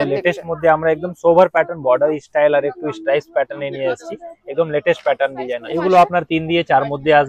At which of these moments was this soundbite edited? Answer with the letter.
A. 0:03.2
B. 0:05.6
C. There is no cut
B